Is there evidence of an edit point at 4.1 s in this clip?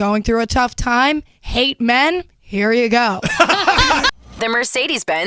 yes; 1 cut; at 4.1 s

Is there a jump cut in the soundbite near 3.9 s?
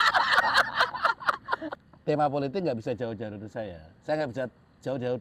no; 1 cut; at 1.9 s

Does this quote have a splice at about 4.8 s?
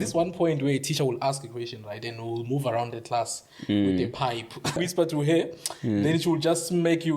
yes; 1 cut; at 4.8 s

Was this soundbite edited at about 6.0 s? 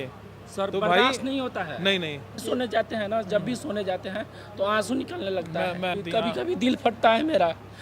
yes; 2 cuts; at 2.4 s, 6.0 s

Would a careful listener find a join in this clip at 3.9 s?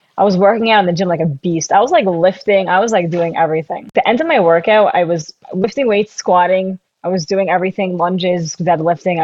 yes; 1 cut; at 3.9 s

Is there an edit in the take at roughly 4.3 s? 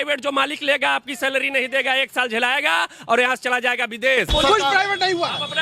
yes; 1 cut; at 4.3 s

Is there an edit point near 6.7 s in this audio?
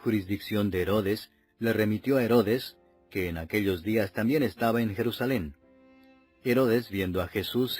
no; 1 cut; at 4.5 s

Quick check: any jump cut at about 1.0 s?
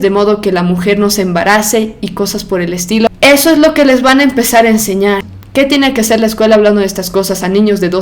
no; 2 cuts; at 3.1 s, 5.3 s

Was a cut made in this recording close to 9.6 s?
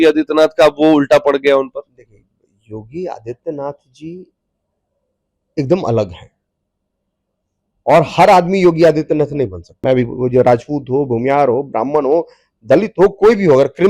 yes; 1 cut; at 9.6 s

